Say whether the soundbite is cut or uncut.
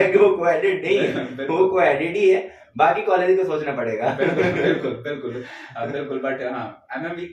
uncut